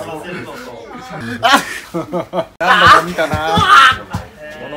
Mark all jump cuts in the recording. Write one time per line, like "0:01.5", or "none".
0:01.2
0:02.6